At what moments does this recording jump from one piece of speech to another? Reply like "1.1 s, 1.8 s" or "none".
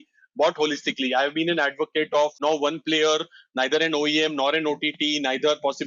2.4 s